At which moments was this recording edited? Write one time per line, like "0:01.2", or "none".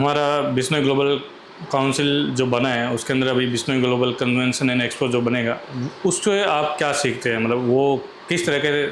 none